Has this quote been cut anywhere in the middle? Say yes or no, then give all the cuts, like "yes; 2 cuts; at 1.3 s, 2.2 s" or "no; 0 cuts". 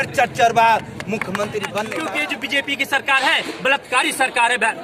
yes; 1 cut; at 2.1 s